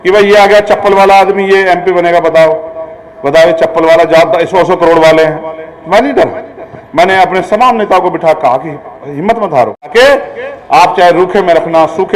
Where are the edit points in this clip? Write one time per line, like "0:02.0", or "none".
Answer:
0:09.9